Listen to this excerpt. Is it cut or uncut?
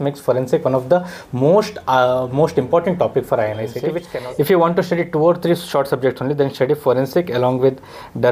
cut